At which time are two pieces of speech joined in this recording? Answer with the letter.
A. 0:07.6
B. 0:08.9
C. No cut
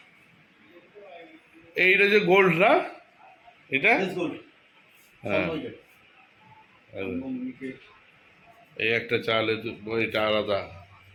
C